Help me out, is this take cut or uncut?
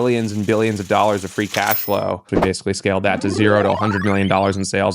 cut